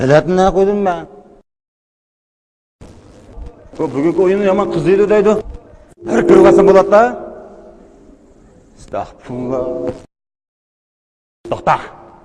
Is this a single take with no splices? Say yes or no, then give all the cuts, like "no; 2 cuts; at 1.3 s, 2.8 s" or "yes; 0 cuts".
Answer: no; 1 cut; at 8.8 s